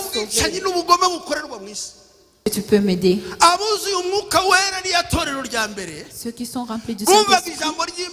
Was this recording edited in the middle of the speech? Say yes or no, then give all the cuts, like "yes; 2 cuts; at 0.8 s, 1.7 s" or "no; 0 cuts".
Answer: yes; 1 cut; at 2.5 s